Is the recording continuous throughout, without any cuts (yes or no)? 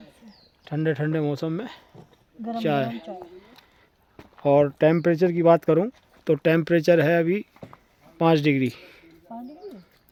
yes